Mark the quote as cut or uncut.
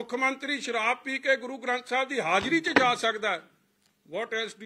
uncut